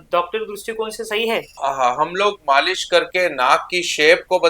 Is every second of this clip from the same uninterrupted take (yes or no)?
no